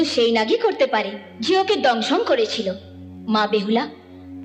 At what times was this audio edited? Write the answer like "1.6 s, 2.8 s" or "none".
none

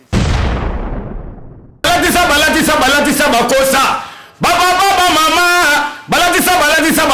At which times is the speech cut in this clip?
1.8 s

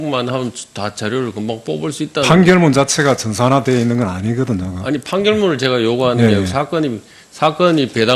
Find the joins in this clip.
4.1 s

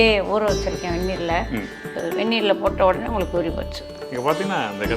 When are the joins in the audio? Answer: 2.0 s

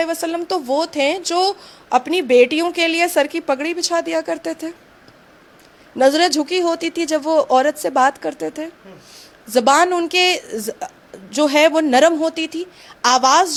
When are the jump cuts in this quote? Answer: none

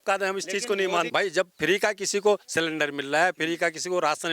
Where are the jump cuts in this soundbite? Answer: 1.1 s

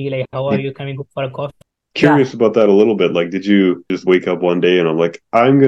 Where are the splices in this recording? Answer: 1.6 s, 3.9 s

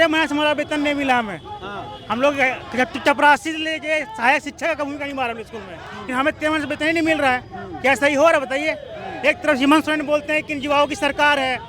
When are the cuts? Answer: none

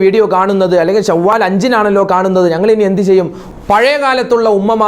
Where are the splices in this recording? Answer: 3.4 s

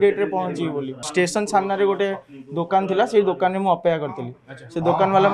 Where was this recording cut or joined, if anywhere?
1.0 s

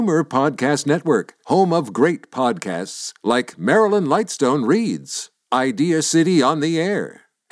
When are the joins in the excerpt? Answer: none

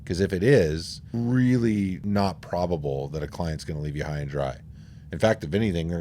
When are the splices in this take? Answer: 1.1 s, 2.0 s

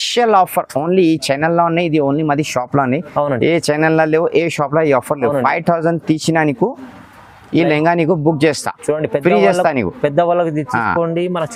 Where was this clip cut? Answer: none

